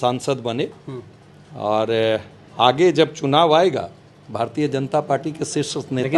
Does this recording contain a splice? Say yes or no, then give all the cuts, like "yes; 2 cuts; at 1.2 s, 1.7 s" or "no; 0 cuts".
no; 0 cuts